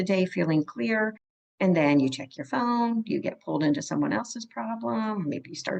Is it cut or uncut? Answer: uncut